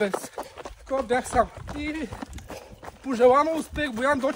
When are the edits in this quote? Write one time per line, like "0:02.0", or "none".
0:01.6